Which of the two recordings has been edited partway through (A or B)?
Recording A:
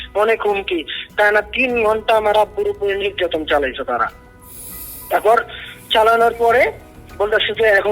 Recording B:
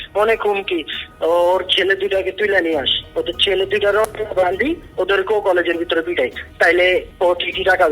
B